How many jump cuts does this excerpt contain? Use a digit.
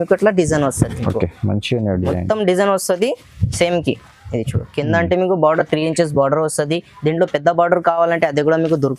0